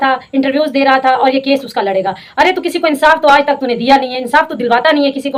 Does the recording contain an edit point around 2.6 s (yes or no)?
no